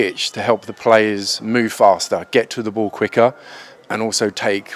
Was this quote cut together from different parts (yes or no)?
no